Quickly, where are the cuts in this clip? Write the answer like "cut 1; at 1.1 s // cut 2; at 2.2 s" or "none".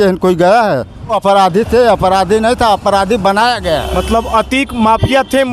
cut 1; at 1.2 s